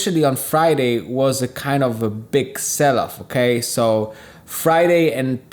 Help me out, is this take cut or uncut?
uncut